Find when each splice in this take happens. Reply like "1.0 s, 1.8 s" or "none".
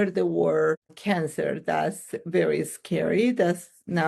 0.9 s